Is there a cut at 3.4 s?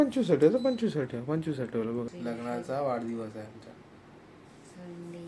no; 1 cut; at 2.1 s

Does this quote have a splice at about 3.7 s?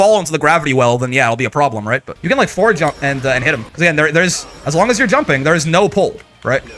yes; 2 cuts; at 2.1 s, 3.7 s

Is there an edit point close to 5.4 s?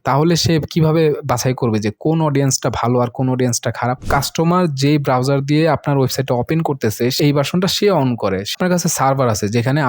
no; 3 cuts; at 4.1 s, 7.2 s, 8.5 s

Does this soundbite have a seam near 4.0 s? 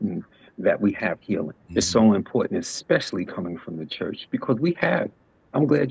no; 1 cut; at 1.6 s

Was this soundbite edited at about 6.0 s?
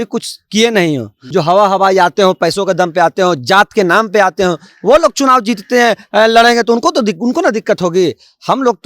no; 1 cut; at 1.2 s

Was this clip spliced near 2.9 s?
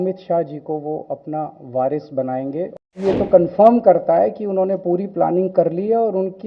yes; 1 cut; at 2.9 s

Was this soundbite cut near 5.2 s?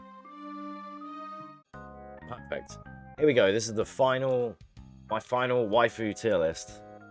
no; 1 cut; at 1.5 s

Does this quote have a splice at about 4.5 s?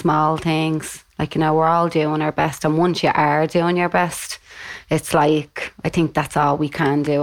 no; 0 cuts

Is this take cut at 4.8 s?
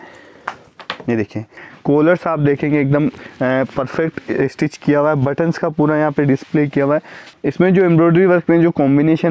no; 2 cuts; at 1.6 s, 7.2 s

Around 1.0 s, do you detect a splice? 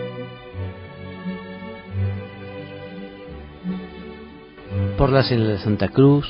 yes; 1 cut; at 1.0 s

